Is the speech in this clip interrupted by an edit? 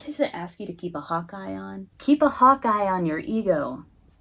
yes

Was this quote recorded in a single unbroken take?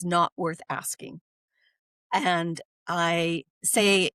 yes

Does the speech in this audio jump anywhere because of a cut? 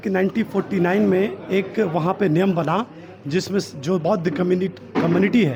no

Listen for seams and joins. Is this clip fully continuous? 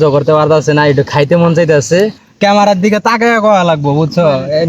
no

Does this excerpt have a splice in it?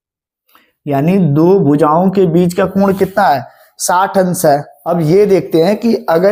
no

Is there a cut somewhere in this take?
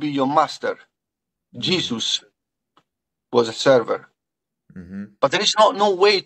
no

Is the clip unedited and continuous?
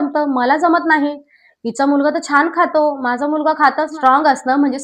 no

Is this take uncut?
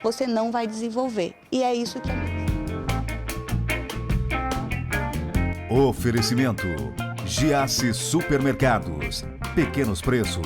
no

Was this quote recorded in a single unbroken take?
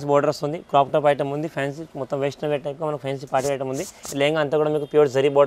yes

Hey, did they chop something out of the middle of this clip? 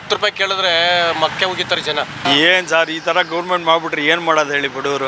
yes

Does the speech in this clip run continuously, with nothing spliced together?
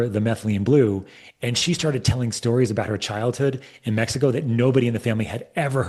yes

